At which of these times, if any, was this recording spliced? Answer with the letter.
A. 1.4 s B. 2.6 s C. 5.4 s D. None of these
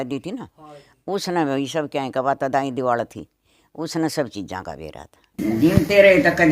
C